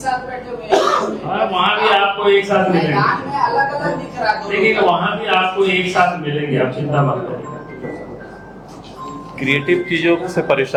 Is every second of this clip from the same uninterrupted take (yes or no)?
yes